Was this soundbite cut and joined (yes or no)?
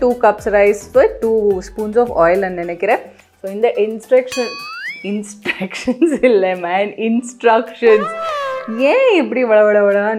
no